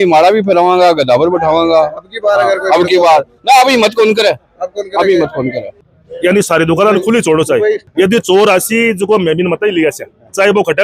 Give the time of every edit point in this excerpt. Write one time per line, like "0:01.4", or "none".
0:05.7
0:07.8